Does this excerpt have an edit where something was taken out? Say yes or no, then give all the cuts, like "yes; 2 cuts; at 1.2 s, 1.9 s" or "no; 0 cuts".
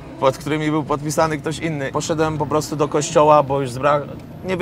yes; 1 cut; at 2.0 s